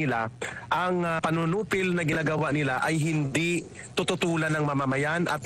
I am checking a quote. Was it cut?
no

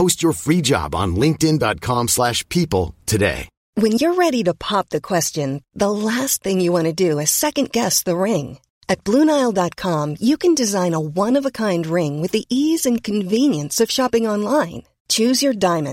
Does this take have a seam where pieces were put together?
yes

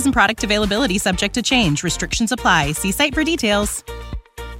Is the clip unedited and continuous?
yes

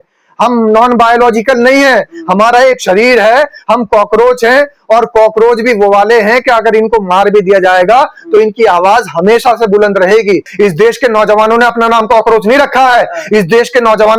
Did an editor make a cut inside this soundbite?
yes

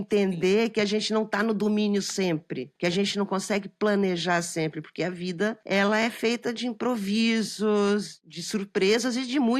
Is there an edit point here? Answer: yes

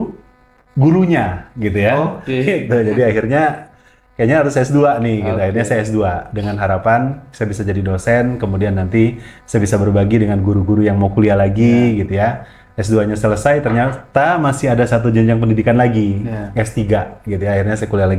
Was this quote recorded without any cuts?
yes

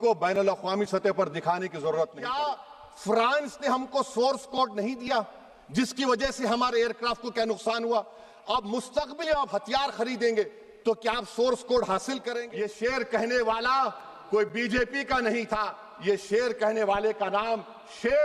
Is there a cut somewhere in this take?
yes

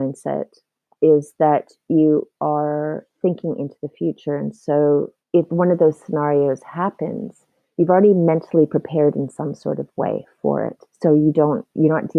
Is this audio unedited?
no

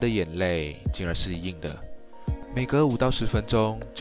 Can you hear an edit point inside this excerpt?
no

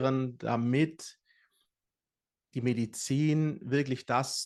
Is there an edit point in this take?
no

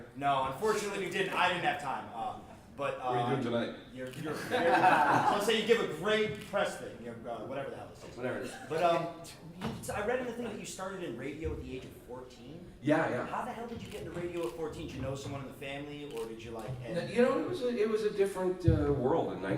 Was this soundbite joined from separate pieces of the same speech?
yes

